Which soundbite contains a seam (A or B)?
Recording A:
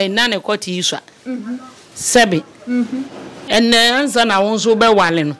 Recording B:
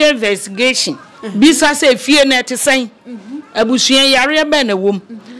A